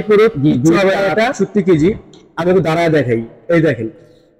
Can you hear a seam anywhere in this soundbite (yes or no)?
yes